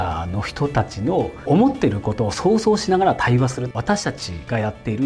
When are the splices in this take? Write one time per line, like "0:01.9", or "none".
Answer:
0:01.4
0:03.7